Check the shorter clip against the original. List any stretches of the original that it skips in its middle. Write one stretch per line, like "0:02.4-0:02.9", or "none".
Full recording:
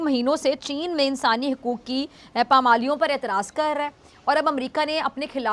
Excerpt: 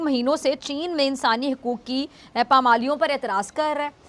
none